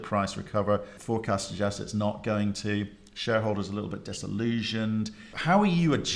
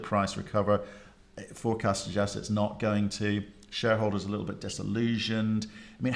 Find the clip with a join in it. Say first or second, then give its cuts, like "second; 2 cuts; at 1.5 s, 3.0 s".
first; 2 cuts; at 0.9 s, 5.3 s